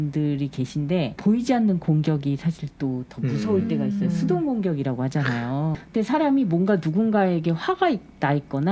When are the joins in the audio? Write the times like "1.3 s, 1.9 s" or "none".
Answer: 1.1 s, 5.8 s